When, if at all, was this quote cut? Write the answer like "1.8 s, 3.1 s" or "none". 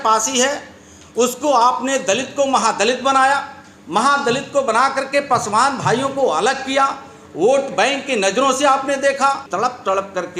9.5 s